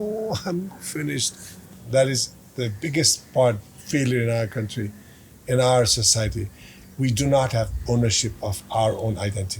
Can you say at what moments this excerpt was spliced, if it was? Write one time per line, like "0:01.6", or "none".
0:01.6